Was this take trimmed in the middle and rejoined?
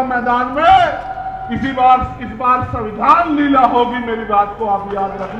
no; 0 cuts

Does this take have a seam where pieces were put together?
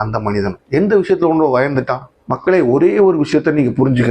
yes; 1 cut; at 2.1 s

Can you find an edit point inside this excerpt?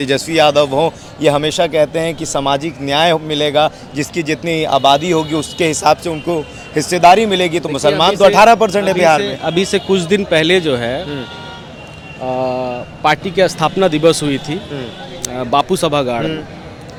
no; 0 cuts

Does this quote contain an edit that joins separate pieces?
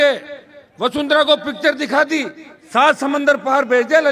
no; 0 cuts

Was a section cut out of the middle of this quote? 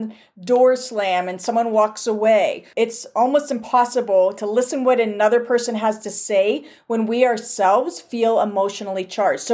yes; 1 cut; at 2.6 s

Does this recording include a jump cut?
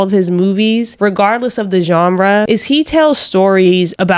yes; 2 cuts; at 0.9 s, 2.5 s

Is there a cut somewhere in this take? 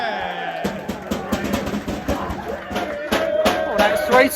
yes; 1 cut; at 2.8 s

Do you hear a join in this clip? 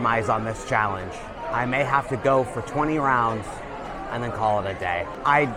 no; 0 cuts

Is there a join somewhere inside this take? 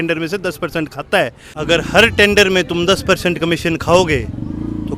yes; 1 cut; at 1.5 s

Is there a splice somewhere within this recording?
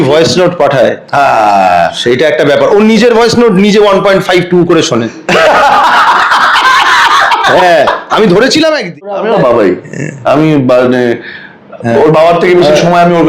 yes; 1 cut; at 9.2 s

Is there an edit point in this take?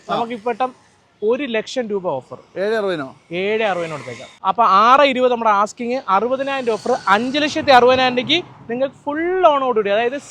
yes; 1 cut; at 4.3 s

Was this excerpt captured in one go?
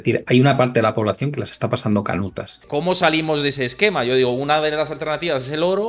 no; 1 cut; at 2.6 s

